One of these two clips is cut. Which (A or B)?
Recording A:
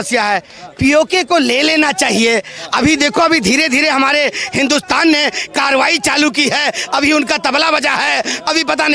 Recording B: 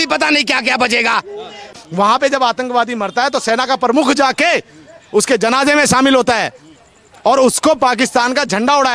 B